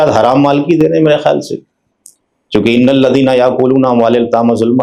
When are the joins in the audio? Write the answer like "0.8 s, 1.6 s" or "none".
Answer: none